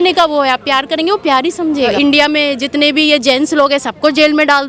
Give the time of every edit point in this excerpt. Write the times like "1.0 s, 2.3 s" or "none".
1.8 s